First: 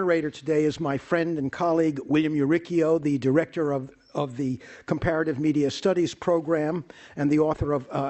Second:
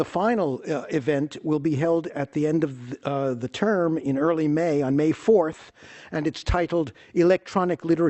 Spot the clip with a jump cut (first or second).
first